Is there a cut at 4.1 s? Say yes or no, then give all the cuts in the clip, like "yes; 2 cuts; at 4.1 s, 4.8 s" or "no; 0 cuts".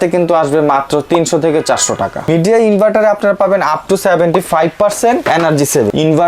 no; 2 cuts; at 2.3 s, 5.5 s